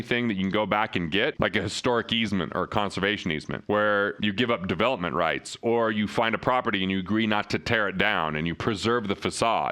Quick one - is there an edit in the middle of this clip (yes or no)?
yes